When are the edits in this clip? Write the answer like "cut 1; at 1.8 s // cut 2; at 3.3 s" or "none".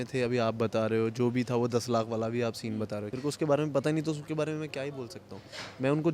cut 1; at 3.1 s